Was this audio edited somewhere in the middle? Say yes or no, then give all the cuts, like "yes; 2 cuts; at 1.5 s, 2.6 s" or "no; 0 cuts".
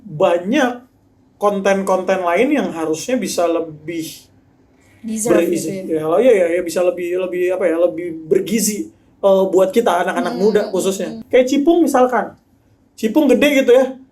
yes; 1 cut; at 11.1 s